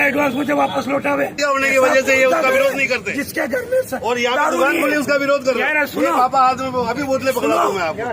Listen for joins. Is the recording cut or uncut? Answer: cut